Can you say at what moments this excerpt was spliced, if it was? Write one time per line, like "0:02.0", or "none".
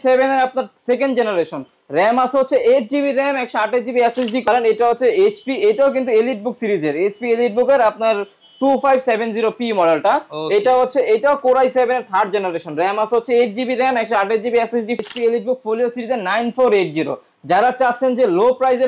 0:04.5
0:15.0